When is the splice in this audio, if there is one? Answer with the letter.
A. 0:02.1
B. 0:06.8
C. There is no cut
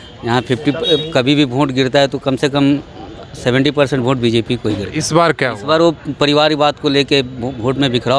C